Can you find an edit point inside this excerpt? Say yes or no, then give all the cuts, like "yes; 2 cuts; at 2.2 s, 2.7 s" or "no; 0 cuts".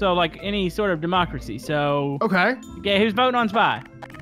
no; 0 cuts